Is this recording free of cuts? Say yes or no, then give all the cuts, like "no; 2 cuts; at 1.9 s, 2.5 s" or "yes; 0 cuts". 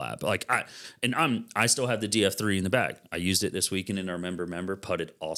yes; 0 cuts